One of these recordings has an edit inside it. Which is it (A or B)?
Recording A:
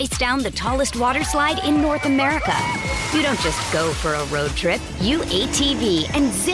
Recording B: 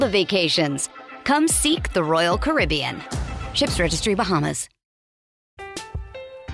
B